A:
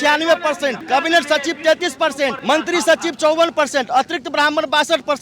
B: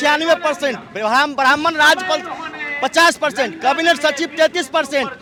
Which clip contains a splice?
A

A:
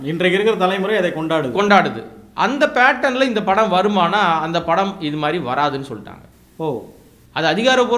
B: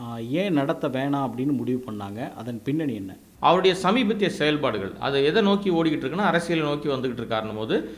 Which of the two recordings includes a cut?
B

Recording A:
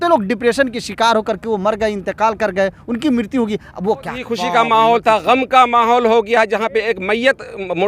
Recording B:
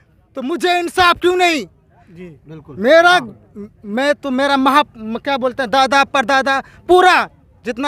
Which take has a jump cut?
A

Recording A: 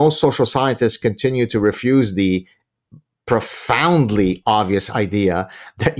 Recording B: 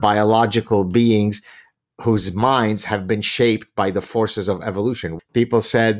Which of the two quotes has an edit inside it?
B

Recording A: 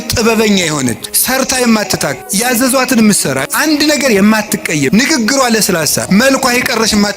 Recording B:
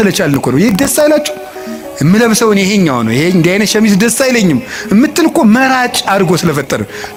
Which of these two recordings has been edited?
A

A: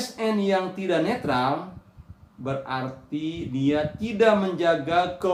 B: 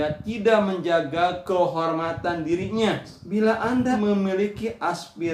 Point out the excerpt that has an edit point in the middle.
B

